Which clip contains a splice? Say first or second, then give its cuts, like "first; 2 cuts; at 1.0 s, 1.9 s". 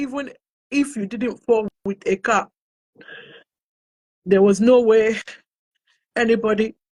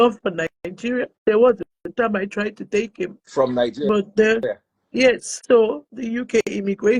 second; 3 cuts; at 1.1 s, 1.8 s, 5.3 s